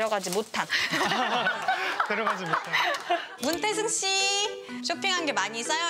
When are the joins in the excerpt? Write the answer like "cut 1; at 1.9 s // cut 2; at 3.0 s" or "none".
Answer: cut 1; at 3.3 s